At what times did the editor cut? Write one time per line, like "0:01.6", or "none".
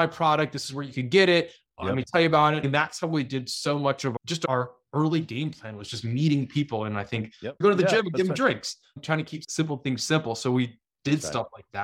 0:02.7
0:04.2
0:07.5
0:09.4